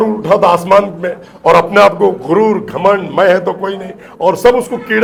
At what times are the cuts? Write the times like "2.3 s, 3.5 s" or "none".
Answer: none

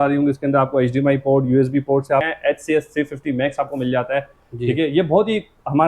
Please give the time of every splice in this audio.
2.3 s

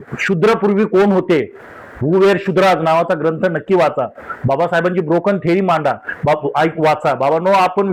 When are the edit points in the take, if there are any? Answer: none

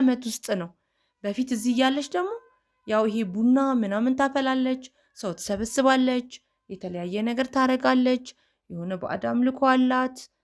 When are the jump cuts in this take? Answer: none

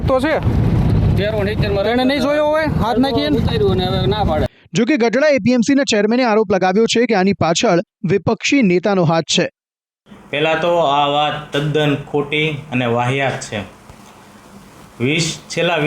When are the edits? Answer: none

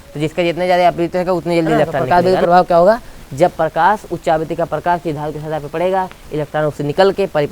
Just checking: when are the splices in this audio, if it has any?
2.0 s

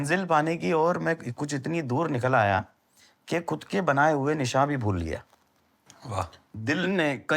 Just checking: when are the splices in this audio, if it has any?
none

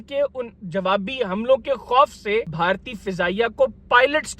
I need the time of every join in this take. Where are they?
2.5 s

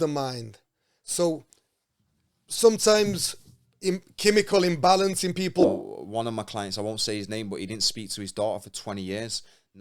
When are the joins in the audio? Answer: 5.7 s

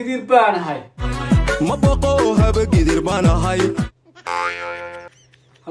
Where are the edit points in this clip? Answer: 1.1 s, 3.9 s

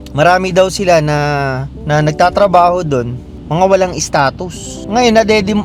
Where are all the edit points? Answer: none

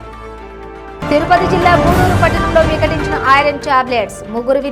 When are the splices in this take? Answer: 1.0 s

